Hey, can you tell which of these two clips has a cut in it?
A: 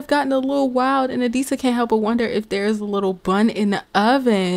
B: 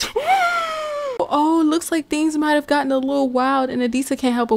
B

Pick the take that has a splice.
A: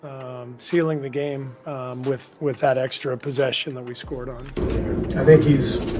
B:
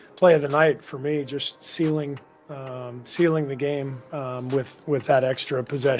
A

